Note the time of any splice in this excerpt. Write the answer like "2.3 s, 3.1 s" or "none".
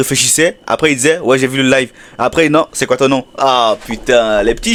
none